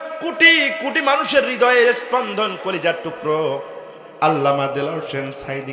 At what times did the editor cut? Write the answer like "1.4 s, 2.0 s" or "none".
none